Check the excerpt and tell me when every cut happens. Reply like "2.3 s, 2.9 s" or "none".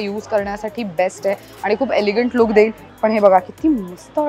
2.8 s